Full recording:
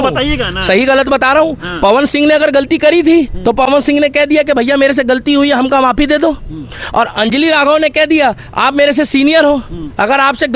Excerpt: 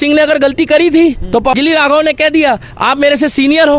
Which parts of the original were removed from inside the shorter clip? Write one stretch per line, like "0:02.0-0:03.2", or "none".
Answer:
0:03.7-0:07.3